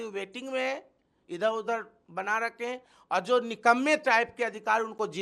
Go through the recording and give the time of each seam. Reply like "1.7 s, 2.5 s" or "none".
none